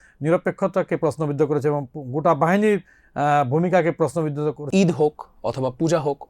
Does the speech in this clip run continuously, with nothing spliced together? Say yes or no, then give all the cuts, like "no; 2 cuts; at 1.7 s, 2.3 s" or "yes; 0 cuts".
no; 1 cut; at 4.6 s